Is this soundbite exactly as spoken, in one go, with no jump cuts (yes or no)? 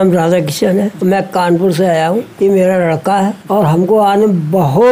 no